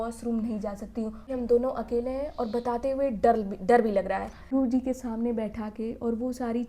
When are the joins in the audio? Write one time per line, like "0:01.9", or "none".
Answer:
0:01.3
0:04.6